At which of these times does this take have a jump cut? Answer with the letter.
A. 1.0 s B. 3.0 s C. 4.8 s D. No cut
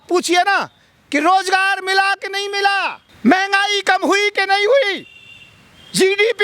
B